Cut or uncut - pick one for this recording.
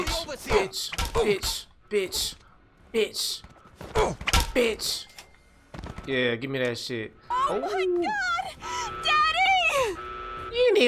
cut